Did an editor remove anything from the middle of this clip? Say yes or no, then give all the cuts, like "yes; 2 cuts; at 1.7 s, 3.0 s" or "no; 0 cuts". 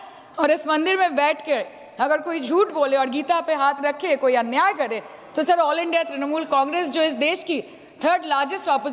no; 0 cuts